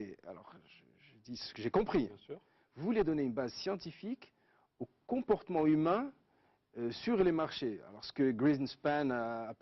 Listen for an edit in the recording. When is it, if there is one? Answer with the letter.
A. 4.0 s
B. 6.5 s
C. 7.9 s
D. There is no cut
C